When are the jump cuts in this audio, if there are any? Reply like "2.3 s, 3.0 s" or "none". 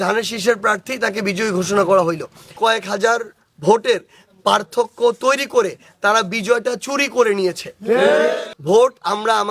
2.5 s, 8.5 s